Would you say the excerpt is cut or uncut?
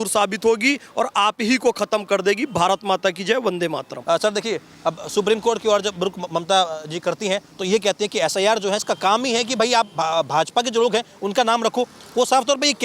uncut